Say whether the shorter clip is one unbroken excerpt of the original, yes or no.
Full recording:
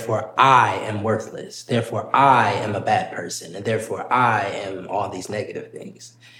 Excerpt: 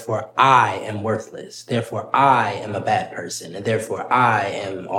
yes